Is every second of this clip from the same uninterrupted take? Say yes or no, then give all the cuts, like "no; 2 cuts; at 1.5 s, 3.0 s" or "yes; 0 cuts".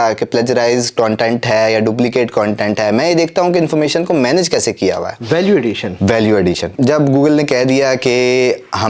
no; 1 cut; at 6.7 s